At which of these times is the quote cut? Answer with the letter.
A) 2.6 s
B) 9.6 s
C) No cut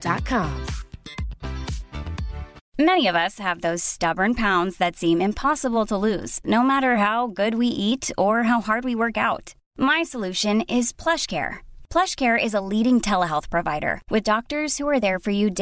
A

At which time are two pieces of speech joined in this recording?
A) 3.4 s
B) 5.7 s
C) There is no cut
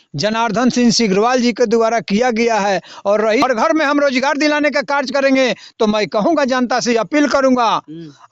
A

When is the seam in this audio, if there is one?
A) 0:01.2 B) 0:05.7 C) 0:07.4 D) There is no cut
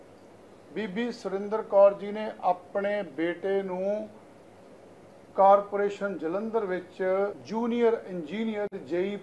C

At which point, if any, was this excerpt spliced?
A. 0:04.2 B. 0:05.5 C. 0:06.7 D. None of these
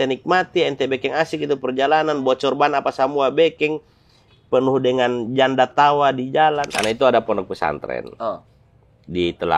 C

